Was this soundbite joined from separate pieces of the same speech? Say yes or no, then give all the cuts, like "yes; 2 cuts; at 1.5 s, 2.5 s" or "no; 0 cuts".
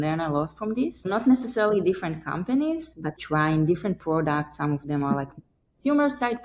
yes; 2 cuts; at 1.1 s, 3.2 s